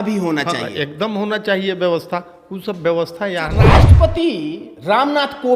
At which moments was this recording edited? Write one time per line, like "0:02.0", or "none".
0:03.7